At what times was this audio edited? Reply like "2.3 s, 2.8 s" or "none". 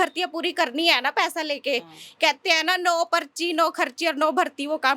none